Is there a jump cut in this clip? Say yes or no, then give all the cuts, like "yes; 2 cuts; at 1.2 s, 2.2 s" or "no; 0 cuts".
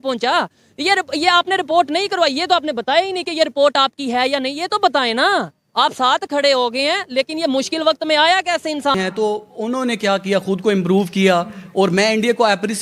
no; 0 cuts